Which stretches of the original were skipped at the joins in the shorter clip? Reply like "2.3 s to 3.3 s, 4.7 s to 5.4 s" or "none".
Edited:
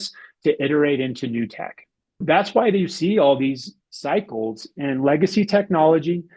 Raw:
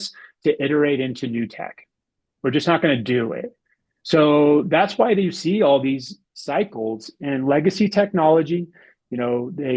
2.2 s to 4.7 s